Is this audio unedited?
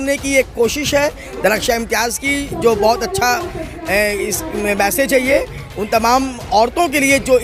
yes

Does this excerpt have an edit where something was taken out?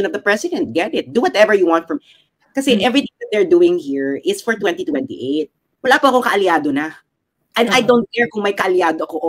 yes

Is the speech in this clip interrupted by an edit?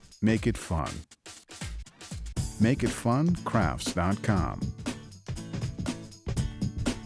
yes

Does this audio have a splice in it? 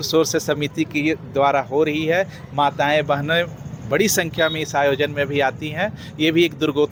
no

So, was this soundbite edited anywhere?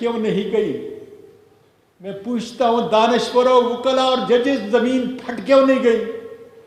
no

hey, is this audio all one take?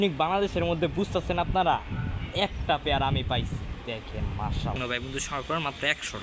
no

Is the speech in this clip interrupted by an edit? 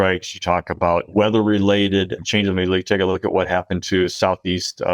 yes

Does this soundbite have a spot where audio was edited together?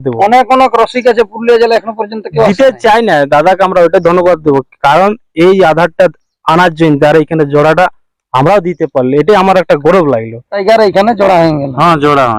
yes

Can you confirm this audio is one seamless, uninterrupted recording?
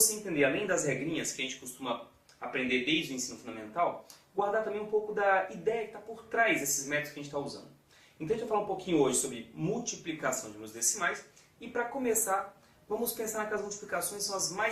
no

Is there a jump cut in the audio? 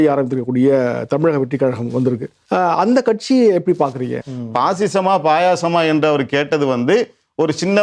yes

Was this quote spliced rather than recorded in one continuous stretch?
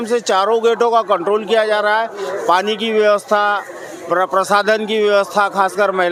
no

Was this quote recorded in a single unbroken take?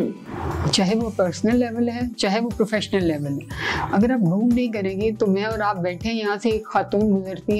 yes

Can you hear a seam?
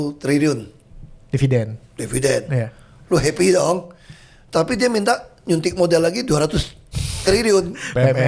no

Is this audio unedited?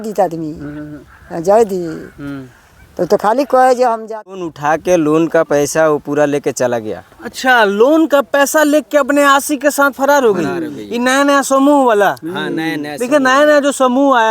no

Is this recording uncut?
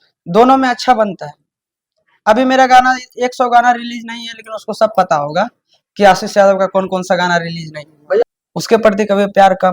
no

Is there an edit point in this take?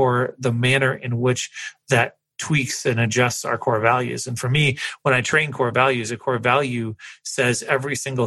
no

